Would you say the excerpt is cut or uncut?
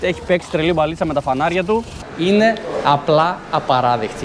cut